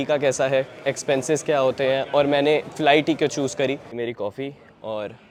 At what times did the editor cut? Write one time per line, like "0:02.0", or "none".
none